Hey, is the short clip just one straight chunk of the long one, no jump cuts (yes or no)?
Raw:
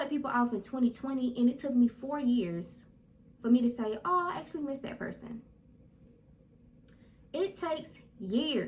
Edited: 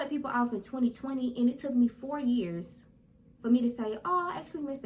yes